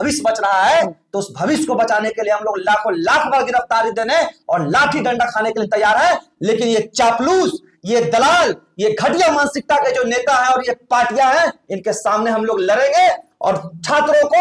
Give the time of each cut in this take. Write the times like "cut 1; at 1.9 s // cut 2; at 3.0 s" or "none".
none